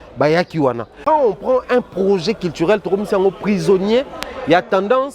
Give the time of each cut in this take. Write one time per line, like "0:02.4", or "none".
0:01.0

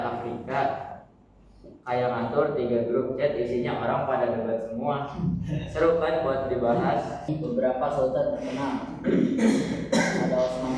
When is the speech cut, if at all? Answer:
0:07.3

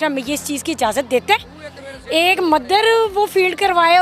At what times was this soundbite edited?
none

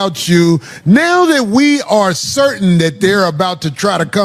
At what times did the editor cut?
none

